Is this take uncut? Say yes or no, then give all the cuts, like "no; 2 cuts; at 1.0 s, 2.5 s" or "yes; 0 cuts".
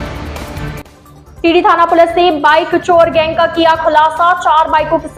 yes; 0 cuts